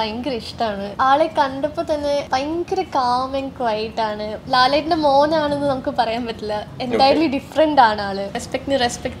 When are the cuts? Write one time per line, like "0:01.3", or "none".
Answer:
0:00.9
0:02.3
0:04.4
0:08.4